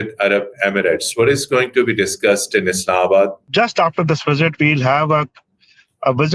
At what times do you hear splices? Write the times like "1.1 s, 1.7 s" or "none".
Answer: 3.4 s